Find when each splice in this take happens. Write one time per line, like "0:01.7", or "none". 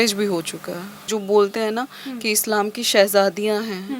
0:01.1

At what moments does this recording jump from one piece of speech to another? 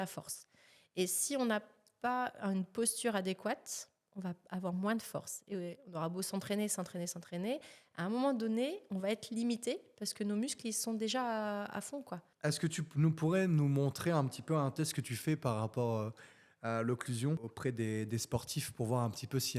0:12.2
0:17.5

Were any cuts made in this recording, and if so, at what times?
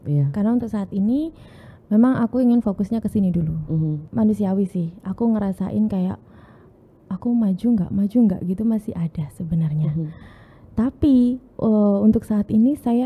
0:04.0

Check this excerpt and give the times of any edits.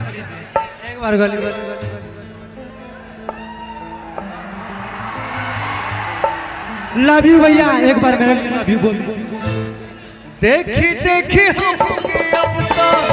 none

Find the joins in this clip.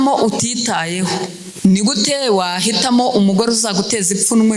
0:01.4

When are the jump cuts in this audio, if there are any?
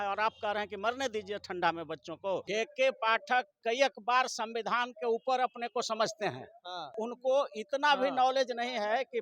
0:02.4
0:07.0

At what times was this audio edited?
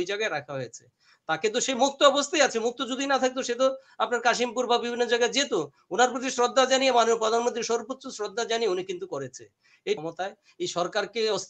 0:10.0

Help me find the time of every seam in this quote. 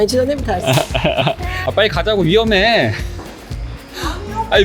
0:01.5

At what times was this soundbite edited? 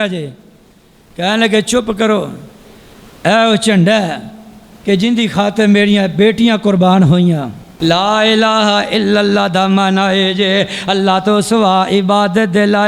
0:07.6

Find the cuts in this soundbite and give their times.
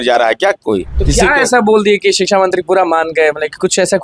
0:00.9

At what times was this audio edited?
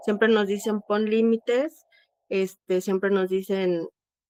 none

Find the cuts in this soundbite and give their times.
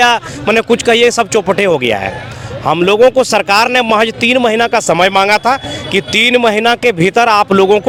none

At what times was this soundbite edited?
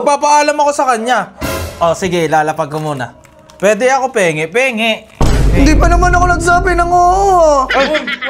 none

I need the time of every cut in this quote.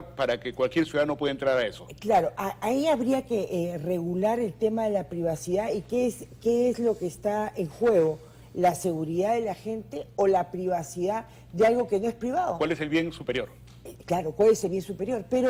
none

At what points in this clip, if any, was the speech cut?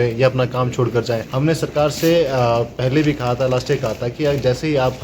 0:01.2

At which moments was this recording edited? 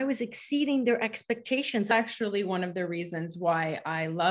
0:01.9

